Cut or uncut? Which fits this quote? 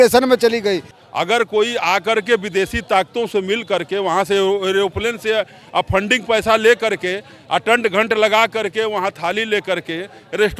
cut